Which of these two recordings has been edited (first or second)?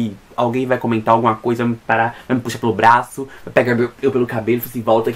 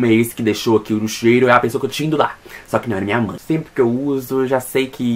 second